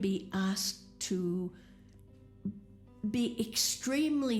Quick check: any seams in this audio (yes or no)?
no